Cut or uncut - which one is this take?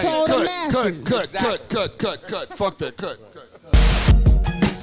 uncut